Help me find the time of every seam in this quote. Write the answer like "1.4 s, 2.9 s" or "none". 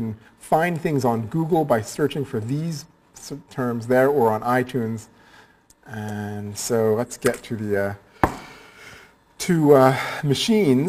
2.7 s